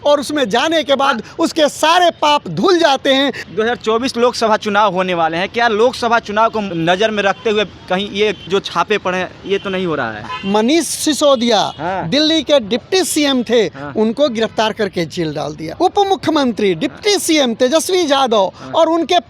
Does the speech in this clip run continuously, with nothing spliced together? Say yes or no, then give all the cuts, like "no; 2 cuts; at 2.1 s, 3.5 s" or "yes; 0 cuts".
no; 5 cuts; at 3.4 s, 6.7 s, 8.5 s, 10.3 s, 15.6 s